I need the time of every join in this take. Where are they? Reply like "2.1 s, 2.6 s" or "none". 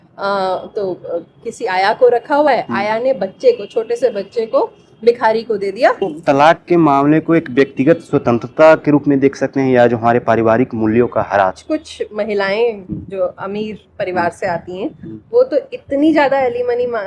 6.1 s, 11.6 s